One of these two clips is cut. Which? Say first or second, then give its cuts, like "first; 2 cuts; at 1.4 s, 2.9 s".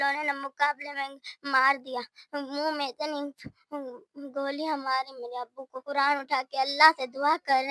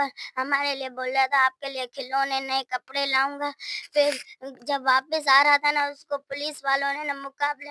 first; 1 cut; at 5.8 s